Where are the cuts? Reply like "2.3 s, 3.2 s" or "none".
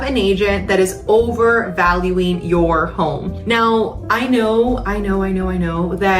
none

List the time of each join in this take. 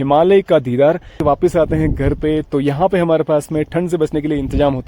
1.2 s

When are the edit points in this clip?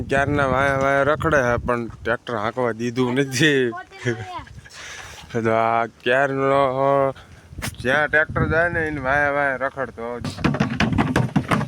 10.3 s

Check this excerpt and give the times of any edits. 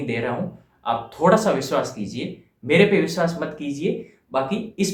none

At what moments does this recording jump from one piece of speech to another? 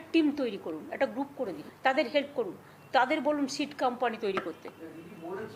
none

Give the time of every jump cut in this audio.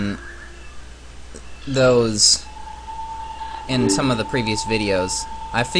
none

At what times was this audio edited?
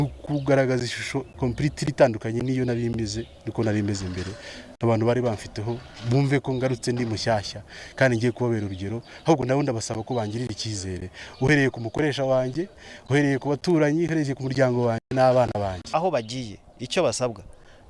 15.9 s

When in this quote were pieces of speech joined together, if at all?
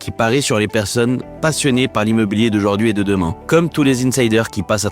3.4 s

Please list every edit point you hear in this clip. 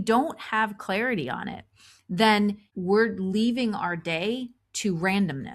2.7 s

